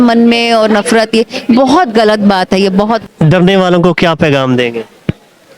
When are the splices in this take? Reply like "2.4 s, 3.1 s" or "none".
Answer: 3.0 s